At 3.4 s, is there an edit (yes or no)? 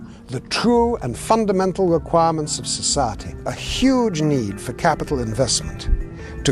yes